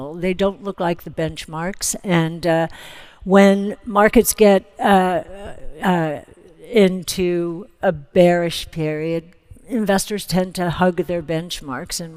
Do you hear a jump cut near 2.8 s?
no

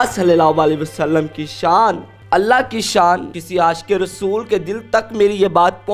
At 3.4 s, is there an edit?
yes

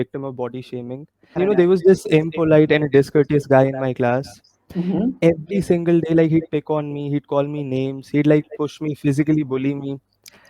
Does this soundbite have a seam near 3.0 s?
no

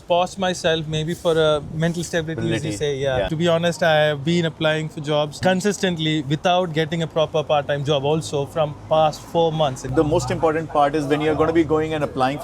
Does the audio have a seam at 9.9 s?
yes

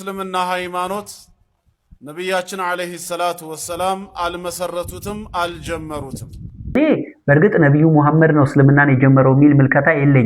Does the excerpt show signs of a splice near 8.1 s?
no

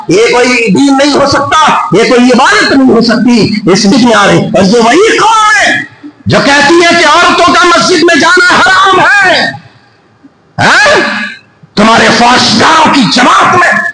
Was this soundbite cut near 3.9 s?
yes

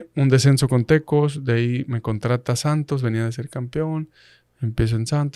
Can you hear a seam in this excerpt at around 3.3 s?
no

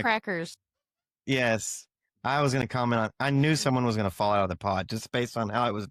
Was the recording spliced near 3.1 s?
no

